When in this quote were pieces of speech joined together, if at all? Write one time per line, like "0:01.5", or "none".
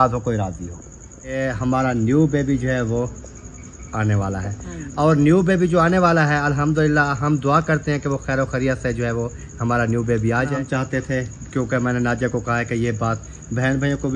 0:01.4
0:10.6